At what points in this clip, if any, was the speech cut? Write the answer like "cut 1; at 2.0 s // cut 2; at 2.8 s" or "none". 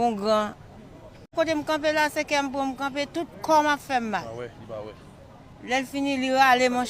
cut 1; at 1.3 s